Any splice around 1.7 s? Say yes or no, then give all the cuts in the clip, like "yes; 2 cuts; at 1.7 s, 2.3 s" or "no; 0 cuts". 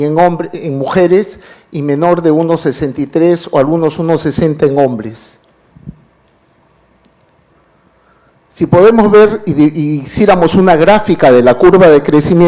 yes; 1 cut; at 1.7 s